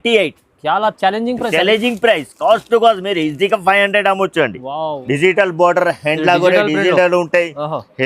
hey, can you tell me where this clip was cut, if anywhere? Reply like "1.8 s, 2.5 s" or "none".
5.0 s